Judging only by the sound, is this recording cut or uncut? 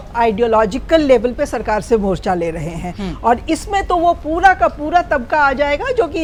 uncut